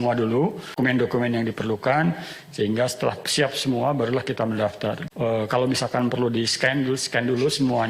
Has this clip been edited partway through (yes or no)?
yes